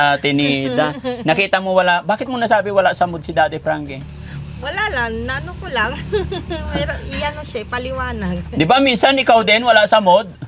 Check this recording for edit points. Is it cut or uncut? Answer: uncut